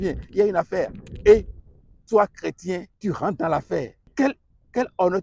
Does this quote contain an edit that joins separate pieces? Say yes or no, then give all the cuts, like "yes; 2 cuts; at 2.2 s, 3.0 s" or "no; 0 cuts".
yes; 2 cuts; at 2.9 s, 4.0 s